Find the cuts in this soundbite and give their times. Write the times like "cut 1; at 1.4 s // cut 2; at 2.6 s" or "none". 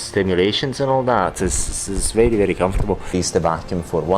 cut 1; at 3.1 s